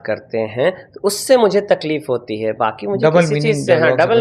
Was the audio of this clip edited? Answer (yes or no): no